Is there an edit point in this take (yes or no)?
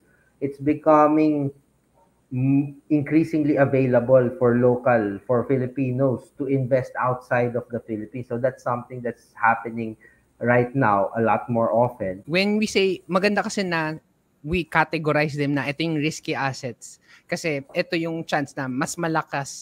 yes